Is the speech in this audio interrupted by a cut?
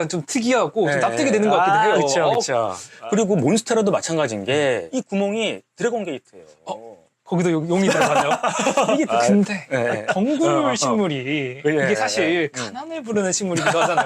yes; 2 cuts; at 3.0 s, 9.1 s

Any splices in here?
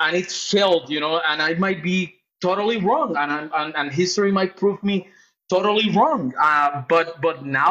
no; 0 cuts

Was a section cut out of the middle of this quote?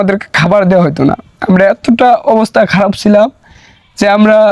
no; 0 cuts

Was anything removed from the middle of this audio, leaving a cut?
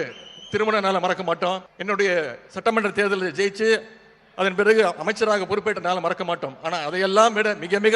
yes; 1 cut; at 1.7 s

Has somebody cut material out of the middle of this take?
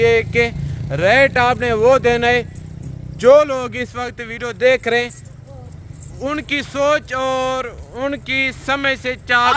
no; 0 cuts

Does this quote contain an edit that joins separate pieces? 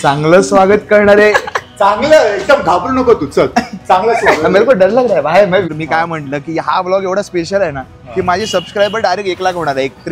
yes; 1 cut; at 5.5 s

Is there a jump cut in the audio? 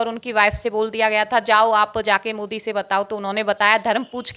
no; 0 cuts

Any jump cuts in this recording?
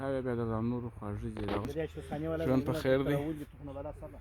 yes; 1 cut; at 1.7 s

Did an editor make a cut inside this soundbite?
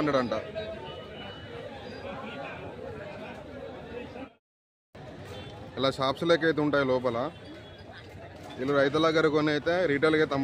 no; 0 cuts

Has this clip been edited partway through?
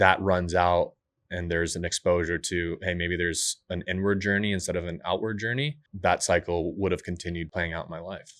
yes; 2 cuts; at 5.8 s, 7.5 s

